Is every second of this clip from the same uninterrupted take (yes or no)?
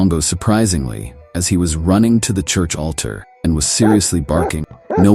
yes